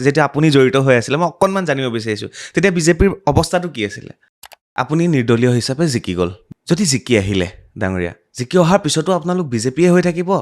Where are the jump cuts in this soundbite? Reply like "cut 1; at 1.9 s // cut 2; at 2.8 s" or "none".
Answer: cut 1; at 4.4 s // cut 2; at 6.4 s